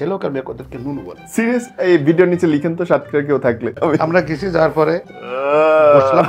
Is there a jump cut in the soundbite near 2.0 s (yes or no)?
no